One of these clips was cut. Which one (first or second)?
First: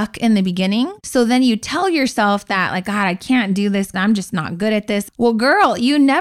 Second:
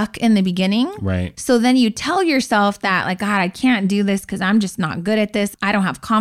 first